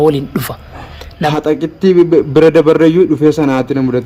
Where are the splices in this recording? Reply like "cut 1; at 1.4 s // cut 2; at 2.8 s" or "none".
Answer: cut 1; at 1.3 s